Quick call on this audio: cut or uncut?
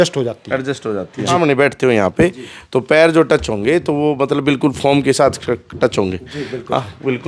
cut